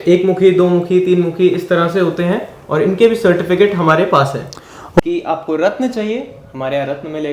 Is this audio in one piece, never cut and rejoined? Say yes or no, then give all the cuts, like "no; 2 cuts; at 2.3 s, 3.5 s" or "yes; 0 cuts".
no; 1 cut; at 5.0 s